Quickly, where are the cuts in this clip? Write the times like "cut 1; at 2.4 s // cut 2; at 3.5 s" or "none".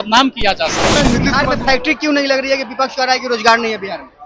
cut 1; at 1.0 s